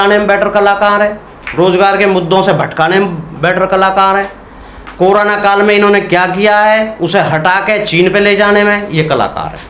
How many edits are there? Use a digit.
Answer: 0